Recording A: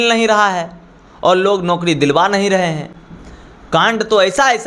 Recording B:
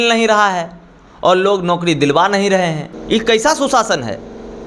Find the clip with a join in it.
B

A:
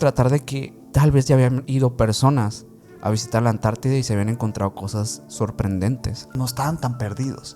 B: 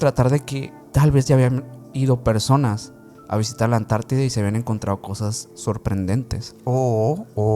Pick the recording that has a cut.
A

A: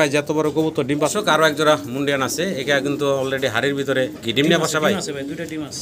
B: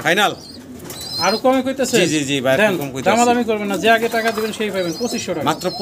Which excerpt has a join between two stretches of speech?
A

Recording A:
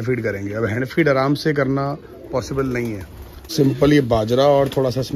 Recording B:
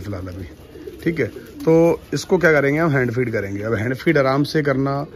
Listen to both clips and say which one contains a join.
A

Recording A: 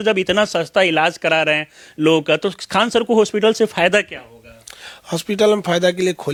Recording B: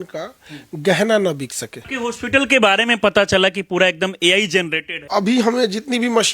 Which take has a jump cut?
B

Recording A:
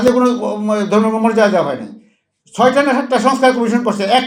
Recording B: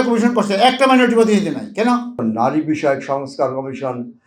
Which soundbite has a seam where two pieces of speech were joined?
B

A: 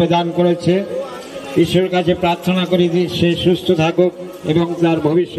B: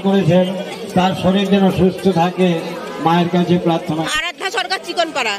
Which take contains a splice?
B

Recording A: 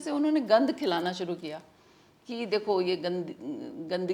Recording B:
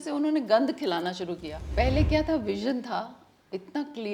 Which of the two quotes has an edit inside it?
B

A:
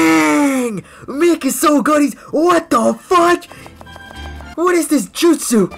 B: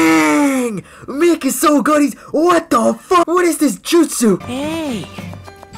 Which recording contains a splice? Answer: B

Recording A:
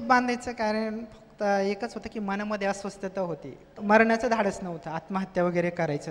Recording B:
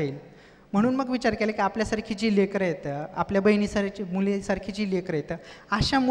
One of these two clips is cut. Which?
A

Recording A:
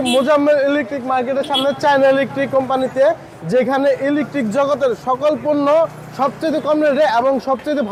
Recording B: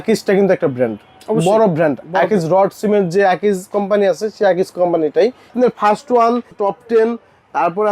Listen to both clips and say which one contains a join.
B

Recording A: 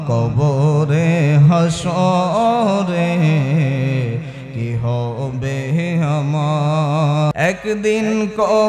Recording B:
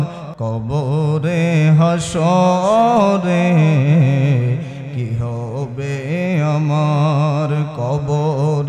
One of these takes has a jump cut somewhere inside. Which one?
A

